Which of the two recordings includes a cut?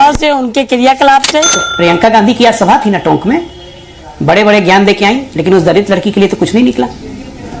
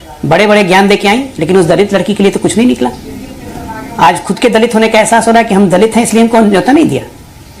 first; 1 cut; at 1.6 s

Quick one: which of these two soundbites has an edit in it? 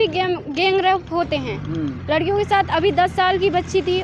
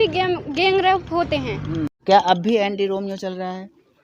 second; 1 cut; at 2.0 s

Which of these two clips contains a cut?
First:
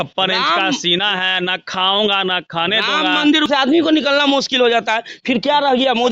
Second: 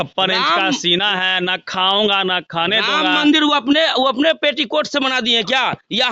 first; 1 cut; at 3.5 s

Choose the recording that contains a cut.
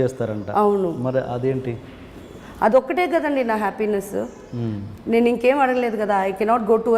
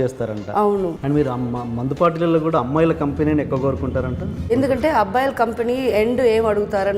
second; 2 cuts; at 1.0 s, 4.5 s

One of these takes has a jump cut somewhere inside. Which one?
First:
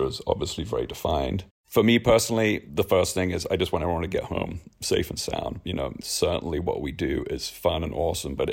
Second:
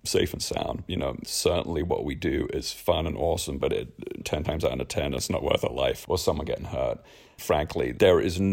first; 2 cuts; at 1.6 s, 2.7 s

